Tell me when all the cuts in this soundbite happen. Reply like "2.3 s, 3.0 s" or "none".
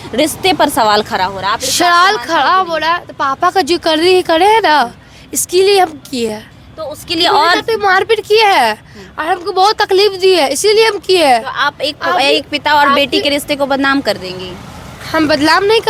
none